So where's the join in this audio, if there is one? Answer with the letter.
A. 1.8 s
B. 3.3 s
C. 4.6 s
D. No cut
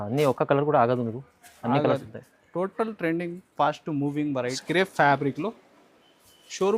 C